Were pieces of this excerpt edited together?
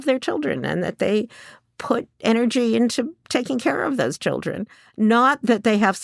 no; 0 cuts

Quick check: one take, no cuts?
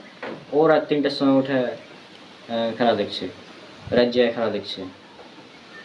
yes; 0 cuts

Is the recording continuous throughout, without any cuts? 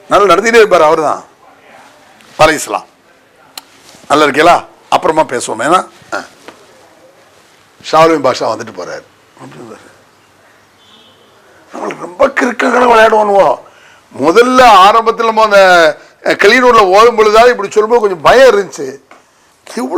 yes; 0 cuts

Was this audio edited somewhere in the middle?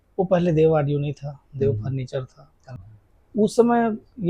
yes; 1 cut; at 2.6 s

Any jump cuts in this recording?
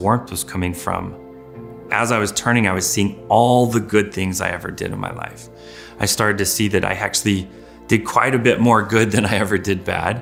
no; 0 cuts

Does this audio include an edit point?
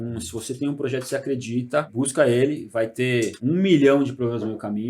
yes; 2 cuts; at 1.9 s, 3.4 s

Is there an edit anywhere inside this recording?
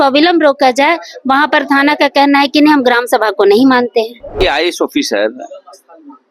yes; 1 cut; at 4.3 s

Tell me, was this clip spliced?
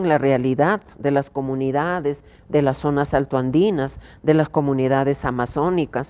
no; 0 cuts

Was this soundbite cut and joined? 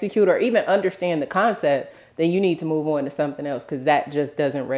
no; 0 cuts

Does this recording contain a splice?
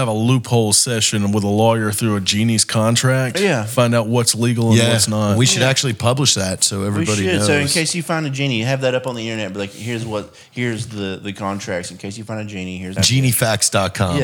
yes; 1 cut; at 12.9 s

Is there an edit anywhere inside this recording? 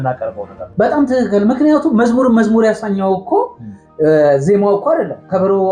no; 0 cuts

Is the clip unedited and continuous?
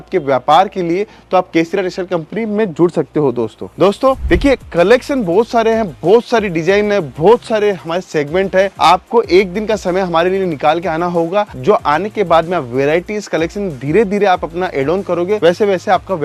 yes; 0 cuts

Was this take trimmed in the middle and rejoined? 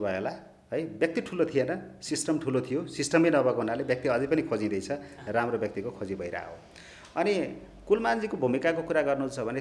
no; 0 cuts

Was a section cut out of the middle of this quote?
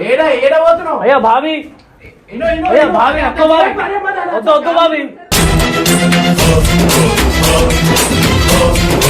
no; 0 cuts

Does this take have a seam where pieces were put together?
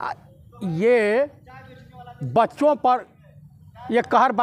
no; 0 cuts

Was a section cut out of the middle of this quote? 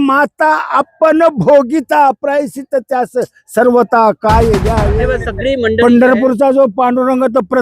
yes; 1 cut; at 4.9 s

